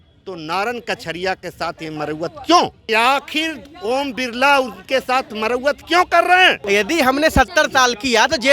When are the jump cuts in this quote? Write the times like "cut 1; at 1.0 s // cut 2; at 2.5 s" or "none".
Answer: cut 1; at 2.8 s // cut 2; at 6.6 s